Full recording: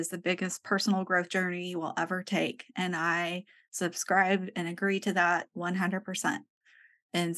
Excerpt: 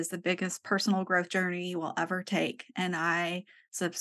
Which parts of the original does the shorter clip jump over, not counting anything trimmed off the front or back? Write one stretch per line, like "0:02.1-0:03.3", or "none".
none